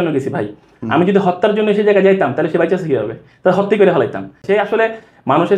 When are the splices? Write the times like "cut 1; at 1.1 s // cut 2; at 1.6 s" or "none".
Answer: cut 1; at 4.4 s